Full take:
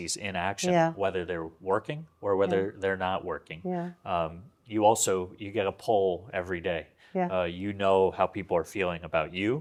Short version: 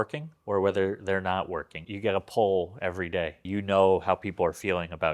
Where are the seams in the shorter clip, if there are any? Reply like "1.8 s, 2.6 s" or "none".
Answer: 1.8 s, 3.5 s